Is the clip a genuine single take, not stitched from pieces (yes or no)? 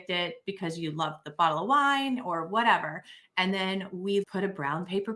no